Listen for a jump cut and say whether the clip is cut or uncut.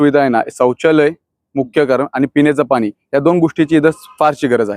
uncut